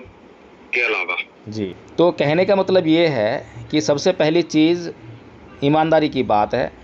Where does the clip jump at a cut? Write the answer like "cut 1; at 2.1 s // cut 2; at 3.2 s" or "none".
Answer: cut 1; at 1.5 s